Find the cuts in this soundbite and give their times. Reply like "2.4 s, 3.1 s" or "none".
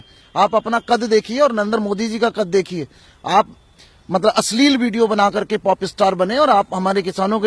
none